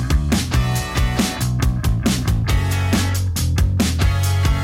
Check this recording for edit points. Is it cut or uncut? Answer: cut